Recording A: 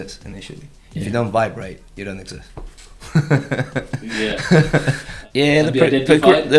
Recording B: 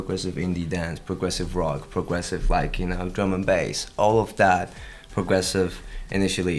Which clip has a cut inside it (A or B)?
A